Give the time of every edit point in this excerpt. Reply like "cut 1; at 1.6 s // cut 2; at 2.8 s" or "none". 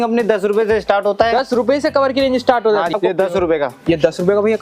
cut 1; at 2.9 s

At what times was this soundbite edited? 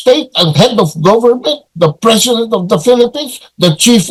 none

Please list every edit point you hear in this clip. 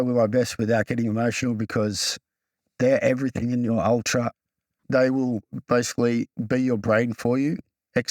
cut 1; at 4.8 s // cut 2; at 6.4 s

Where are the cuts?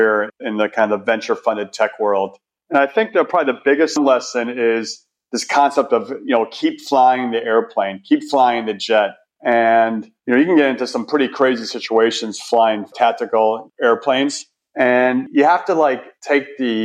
cut 1; at 4.0 s

